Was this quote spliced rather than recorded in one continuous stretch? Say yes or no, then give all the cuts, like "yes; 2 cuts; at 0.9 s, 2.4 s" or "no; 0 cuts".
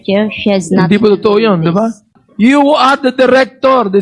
yes; 1 cut; at 2.2 s